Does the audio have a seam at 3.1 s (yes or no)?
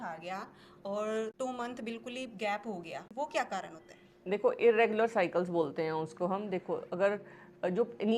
yes